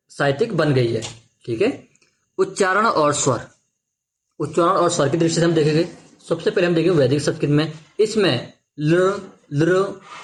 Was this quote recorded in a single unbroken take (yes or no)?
yes